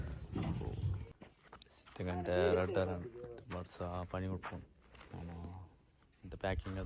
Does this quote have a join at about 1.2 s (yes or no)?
yes